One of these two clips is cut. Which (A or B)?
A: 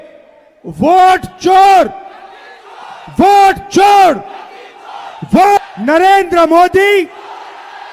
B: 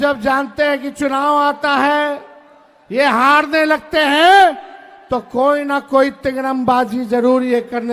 A